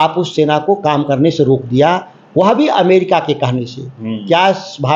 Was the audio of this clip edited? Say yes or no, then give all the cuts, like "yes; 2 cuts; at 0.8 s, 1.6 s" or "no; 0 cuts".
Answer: no; 0 cuts